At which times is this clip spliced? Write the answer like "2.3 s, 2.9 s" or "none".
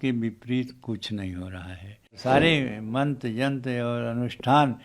2.2 s

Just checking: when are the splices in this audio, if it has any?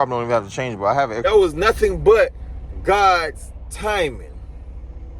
1.2 s

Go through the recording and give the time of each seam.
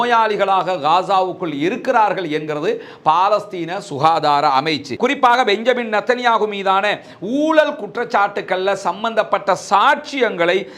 4.9 s

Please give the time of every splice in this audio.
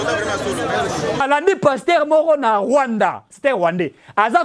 1.2 s

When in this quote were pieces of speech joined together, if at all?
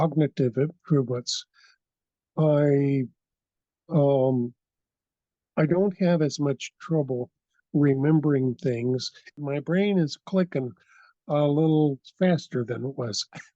9.5 s

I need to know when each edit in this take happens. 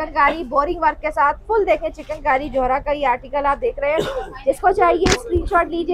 none

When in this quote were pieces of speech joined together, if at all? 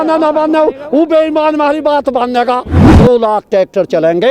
2.8 s

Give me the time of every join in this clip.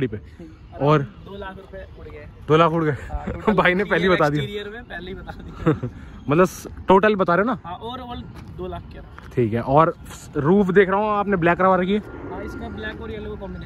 none

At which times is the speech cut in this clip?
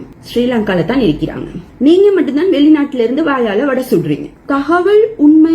4.4 s

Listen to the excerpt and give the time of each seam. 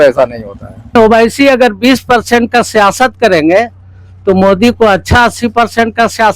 1.0 s

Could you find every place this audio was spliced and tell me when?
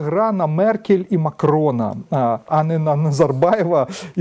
none

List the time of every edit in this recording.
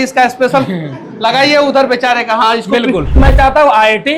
3.2 s

